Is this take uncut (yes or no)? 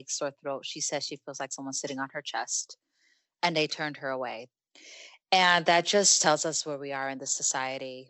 no